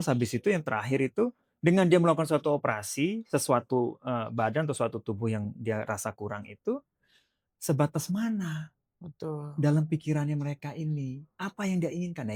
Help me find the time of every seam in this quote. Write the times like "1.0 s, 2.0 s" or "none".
none